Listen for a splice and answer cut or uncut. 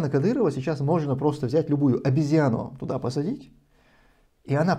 uncut